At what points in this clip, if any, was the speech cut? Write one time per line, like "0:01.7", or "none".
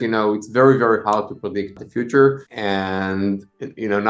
0:01.7
0:02.5